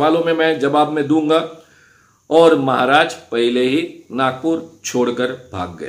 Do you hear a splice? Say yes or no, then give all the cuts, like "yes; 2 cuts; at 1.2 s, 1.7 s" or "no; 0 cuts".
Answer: no; 0 cuts